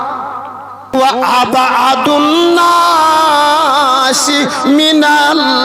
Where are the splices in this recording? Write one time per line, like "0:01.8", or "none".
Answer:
0:00.9